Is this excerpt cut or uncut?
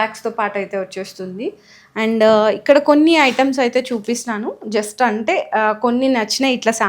uncut